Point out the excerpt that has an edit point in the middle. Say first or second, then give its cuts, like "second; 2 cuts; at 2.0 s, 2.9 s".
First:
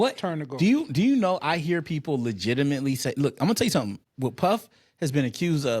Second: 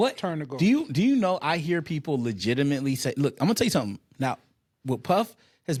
first; 1 cut; at 4.0 s